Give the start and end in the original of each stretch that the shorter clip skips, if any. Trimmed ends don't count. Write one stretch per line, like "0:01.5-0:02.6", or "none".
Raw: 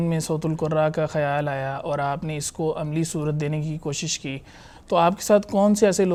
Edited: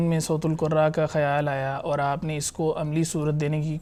none